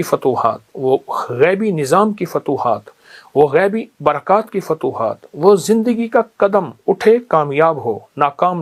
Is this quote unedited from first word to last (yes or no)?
yes